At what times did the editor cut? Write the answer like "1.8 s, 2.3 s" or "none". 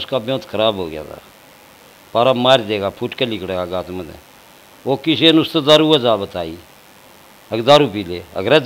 none